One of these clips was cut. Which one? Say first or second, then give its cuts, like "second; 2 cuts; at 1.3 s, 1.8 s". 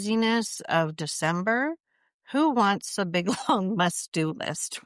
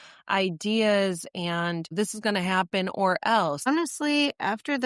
second; 2 cuts; at 1.9 s, 3.7 s